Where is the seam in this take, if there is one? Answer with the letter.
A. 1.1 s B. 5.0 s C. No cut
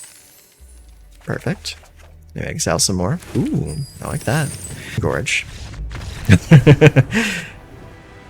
B